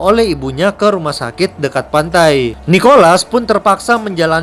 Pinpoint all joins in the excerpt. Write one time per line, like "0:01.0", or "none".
0:02.6